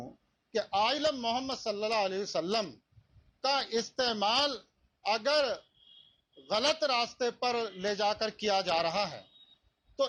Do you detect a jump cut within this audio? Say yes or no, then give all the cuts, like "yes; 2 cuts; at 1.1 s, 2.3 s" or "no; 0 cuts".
no; 0 cuts